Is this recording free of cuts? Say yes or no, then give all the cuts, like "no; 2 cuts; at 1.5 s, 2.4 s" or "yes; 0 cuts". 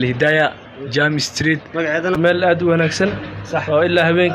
no; 1 cut; at 2.2 s